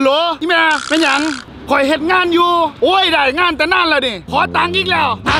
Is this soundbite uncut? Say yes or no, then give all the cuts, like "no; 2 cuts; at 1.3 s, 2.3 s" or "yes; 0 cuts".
no; 1 cut; at 4.2 s